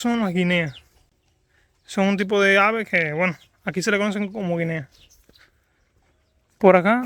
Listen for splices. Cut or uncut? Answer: uncut